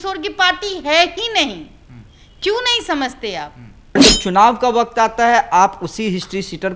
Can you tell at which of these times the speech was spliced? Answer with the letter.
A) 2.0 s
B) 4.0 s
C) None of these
B